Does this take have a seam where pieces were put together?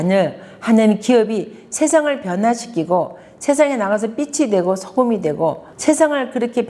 no; 0 cuts

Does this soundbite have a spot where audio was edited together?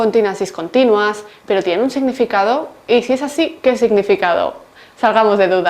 yes; 1 cut; at 3.5 s

